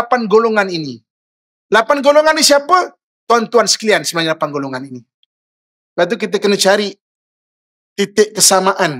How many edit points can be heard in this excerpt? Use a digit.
0